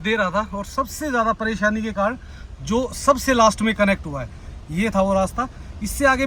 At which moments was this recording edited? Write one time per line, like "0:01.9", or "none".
none